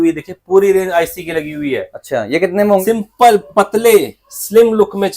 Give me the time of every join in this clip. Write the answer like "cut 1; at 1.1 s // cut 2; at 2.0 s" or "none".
cut 1; at 2.8 s